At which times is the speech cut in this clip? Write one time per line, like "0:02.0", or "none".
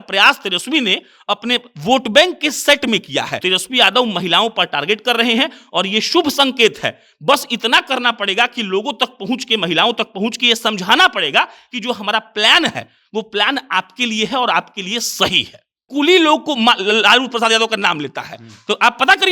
0:03.4
0:15.8